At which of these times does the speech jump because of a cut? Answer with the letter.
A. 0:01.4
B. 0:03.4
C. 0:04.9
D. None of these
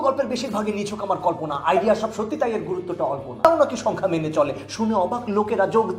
B